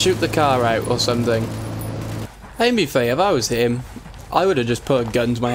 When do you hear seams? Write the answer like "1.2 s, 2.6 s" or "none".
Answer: 2.2 s